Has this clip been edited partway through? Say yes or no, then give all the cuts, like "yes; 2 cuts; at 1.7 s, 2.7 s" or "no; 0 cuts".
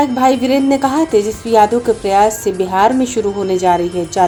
no; 0 cuts